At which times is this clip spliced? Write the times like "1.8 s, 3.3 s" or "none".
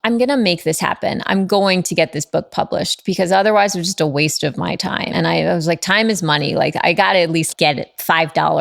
5.1 s, 7.5 s